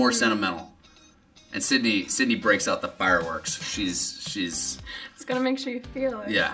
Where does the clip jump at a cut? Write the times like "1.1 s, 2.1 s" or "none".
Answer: none